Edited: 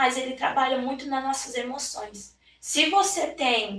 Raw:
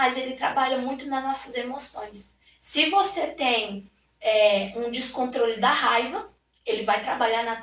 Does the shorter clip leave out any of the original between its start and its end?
no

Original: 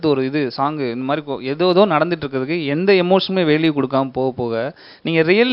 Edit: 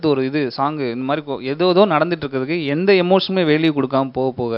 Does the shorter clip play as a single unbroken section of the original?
yes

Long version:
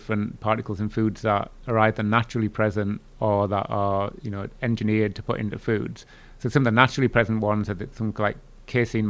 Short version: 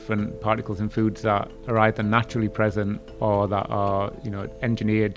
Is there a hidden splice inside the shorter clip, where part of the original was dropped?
no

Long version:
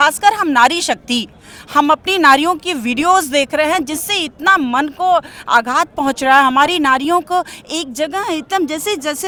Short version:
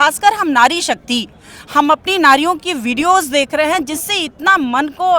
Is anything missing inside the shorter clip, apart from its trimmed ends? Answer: no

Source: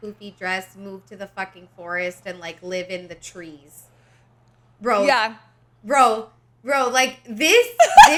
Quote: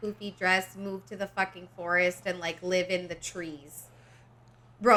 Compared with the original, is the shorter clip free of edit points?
yes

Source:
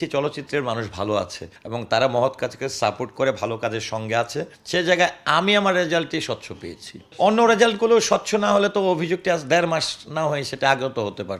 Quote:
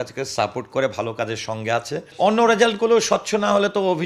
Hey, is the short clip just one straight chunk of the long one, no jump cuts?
no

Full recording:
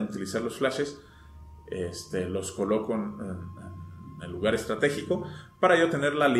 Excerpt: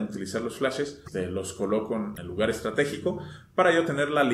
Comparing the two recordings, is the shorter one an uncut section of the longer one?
no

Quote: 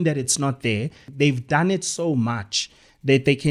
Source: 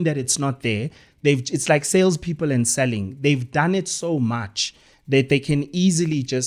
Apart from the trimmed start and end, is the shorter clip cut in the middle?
yes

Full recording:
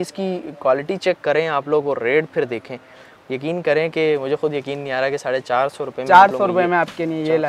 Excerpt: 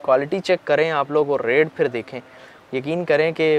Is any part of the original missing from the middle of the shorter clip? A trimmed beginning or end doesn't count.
no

